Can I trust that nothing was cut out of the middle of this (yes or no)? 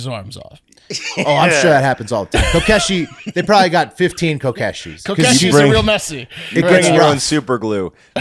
yes